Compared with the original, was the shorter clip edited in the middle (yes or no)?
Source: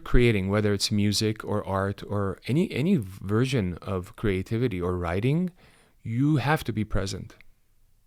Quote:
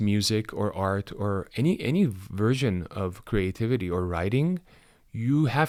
no